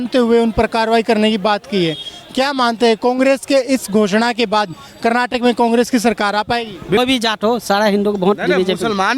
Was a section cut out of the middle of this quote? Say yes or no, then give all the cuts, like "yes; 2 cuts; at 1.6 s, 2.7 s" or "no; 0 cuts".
yes; 1 cut; at 7.0 s